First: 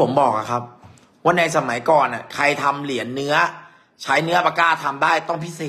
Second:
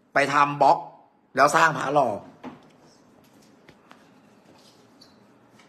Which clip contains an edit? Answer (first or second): second